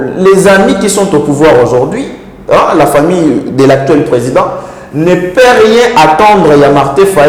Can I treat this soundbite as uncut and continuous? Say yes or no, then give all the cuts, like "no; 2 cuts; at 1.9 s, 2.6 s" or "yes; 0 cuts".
yes; 0 cuts